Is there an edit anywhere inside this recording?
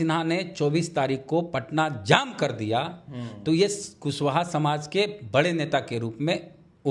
no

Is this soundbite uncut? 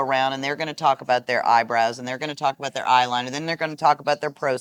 yes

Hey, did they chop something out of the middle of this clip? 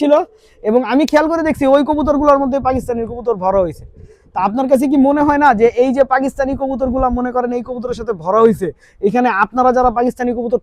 no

